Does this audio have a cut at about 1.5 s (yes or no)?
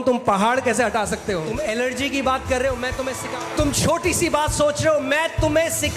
yes